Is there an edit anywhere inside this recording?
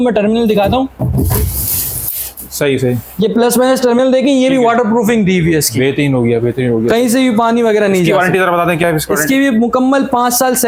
no; 0 cuts

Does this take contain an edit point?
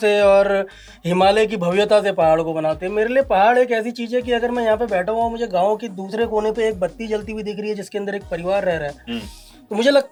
no; 0 cuts

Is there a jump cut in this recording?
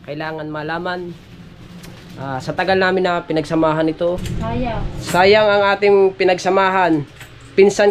yes; 1 cut; at 4.3 s

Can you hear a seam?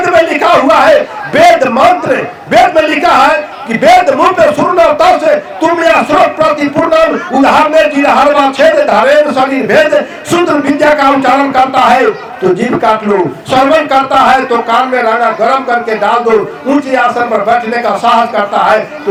no; 0 cuts

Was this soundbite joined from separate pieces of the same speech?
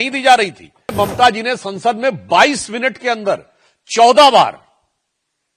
yes; 1 cut; at 0.9 s

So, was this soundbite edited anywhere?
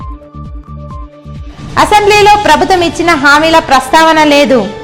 no; 0 cuts

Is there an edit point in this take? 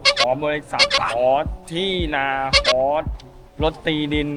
no; 0 cuts

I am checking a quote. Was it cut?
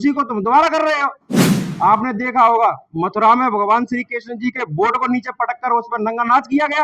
yes; 1 cut; at 1.5 s

